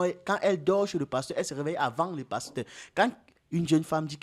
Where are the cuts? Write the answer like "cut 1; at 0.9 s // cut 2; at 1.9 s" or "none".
none